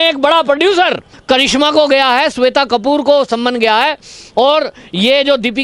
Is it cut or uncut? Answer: cut